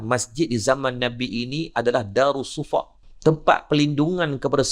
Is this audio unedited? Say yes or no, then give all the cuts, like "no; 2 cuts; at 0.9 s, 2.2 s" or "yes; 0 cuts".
no; 1 cut; at 3.0 s